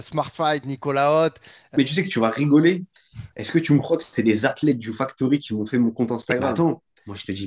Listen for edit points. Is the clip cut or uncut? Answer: cut